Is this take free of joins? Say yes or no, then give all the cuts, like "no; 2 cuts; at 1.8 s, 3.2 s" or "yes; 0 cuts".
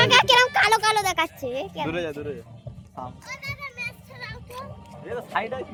yes; 0 cuts